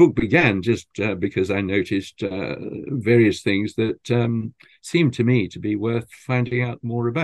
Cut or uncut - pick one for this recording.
uncut